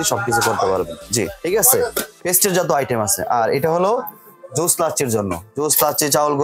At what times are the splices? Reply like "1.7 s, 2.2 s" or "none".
none